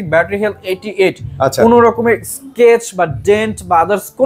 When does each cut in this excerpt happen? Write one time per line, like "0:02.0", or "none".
none